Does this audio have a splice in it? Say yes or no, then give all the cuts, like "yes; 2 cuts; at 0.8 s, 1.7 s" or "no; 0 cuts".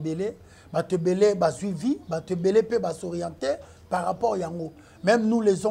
no; 0 cuts